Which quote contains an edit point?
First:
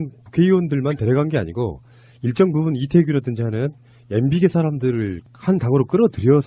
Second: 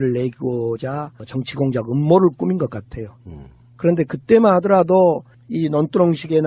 second; 1 cut; at 3.4 s

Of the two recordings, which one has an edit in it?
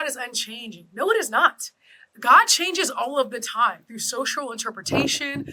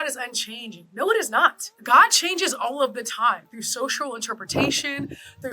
second; 1 cut; at 1.7 s

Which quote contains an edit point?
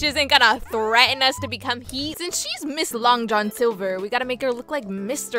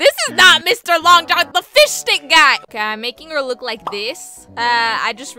first; 1 cut; at 2.1 s

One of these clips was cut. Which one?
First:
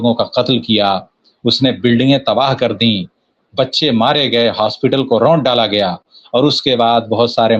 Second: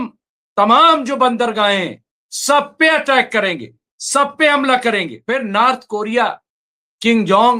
second; 1 cut; at 5.1 s

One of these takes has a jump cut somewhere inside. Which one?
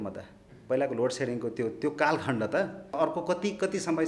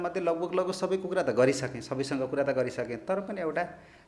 first; 1 cut; at 2.9 s

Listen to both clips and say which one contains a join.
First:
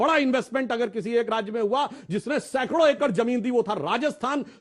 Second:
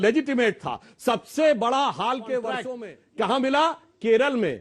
second; 1 cut; at 2.6 s

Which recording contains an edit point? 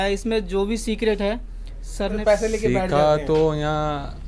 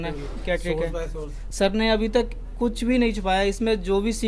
first; 1 cut; at 2.1 s

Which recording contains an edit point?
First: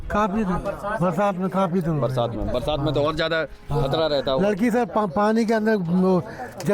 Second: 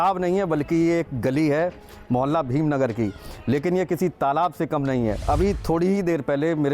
second; 1 cut; at 5.2 s

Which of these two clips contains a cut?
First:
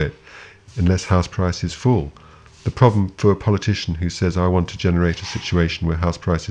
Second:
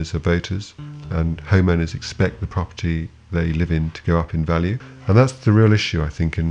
second; 1 cut; at 4.9 s

